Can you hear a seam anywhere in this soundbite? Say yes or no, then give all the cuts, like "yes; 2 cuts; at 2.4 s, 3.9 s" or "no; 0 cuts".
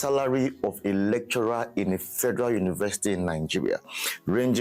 no; 0 cuts